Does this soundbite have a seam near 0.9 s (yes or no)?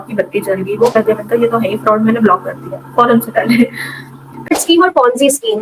yes